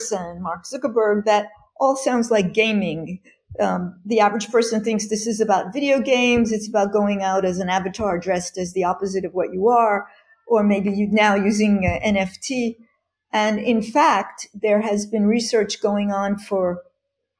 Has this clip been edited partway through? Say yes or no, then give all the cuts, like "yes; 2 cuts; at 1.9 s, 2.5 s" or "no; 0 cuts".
no; 0 cuts